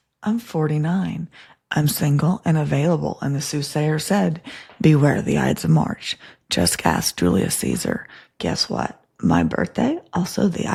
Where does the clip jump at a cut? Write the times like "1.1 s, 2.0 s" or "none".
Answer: none